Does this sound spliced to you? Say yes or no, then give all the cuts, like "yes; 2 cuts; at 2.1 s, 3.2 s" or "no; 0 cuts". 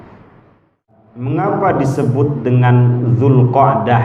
yes; 1 cut; at 0.9 s